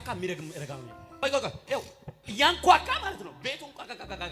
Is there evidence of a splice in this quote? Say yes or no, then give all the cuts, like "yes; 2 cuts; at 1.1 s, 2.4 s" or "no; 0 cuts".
yes; 1 cut; at 1.2 s